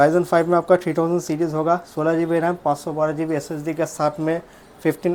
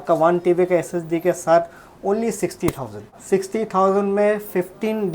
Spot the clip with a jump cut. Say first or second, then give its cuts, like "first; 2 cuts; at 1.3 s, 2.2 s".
second; 1 cut; at 3.1 s